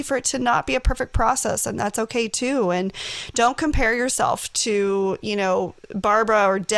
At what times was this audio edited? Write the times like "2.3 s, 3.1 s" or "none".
none